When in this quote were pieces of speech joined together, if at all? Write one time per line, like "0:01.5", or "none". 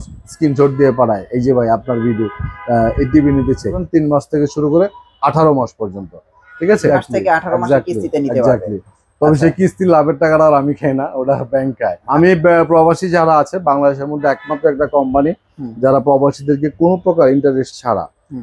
0:03.8
0:06.9
0:12.0